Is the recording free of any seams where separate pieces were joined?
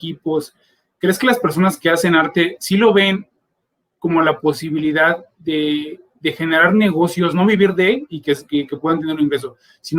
yes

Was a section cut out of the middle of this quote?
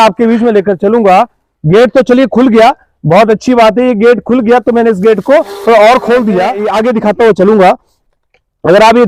yes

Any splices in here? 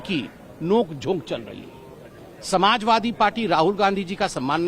no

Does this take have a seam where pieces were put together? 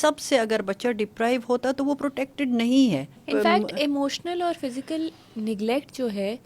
yes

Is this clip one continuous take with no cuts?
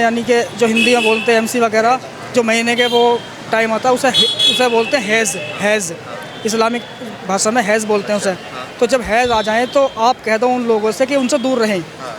yes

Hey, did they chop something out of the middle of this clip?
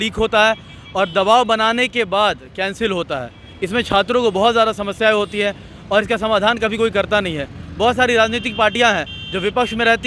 no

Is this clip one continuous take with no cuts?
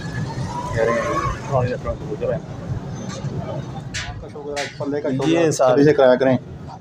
no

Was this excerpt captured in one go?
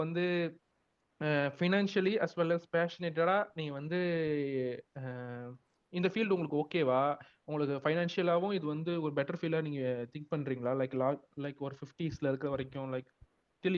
yes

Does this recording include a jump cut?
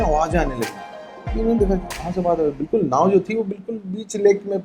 no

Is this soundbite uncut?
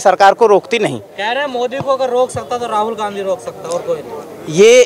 yes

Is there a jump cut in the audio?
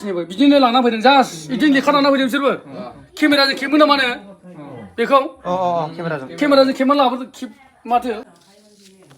yes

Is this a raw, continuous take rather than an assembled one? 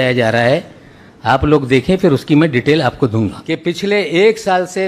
no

